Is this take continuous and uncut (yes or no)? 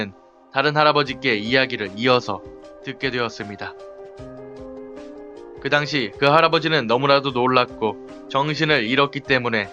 no